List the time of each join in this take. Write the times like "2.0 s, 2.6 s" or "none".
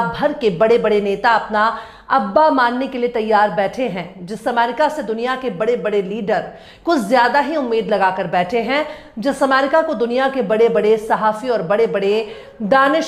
none